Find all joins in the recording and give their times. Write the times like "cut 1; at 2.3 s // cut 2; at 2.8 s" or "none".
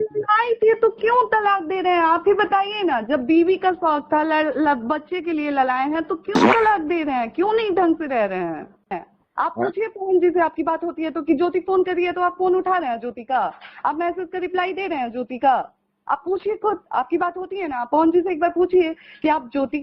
cut 1; at 9.1 s

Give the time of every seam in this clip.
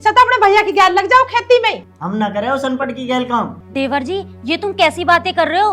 cut 1; at 1.9 s // cut 2; at 3.6 s

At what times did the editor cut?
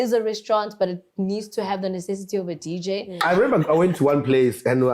cut 1; at 3.1 s

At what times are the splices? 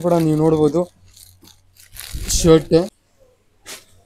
cut 1; at 2.9 s

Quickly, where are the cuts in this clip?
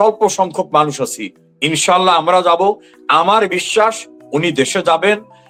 none

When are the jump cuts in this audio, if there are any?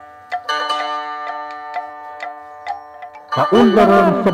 cut 1; at 3.4 s

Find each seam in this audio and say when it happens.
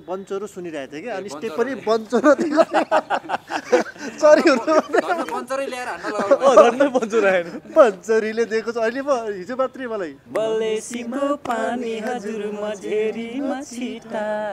cut 1; at 10.2 s

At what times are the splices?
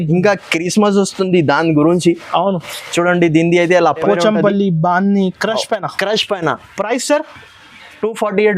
cut 1; at 4.0 s

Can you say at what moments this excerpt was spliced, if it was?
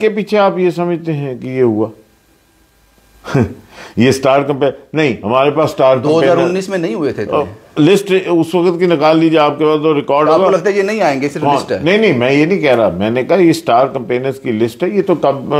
none

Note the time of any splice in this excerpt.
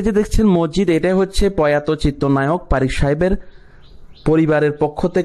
none

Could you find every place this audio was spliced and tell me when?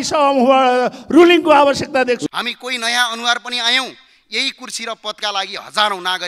cut 1; at 2.2 s

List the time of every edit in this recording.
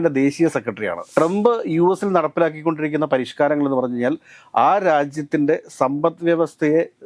cut 1; at 0.9 s

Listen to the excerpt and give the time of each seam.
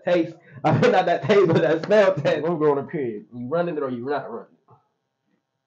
cut 1; at 2.4 s

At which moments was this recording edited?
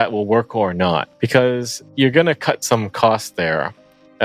cut 1; at 1.1 s // cut 2; at 1.8 s

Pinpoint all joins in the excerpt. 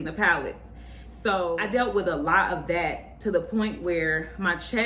cut 1; at 1.6 s

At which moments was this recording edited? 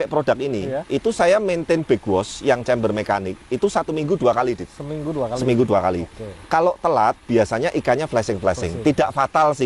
none

